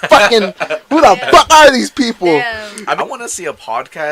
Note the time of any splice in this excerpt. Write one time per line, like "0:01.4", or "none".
0:03.0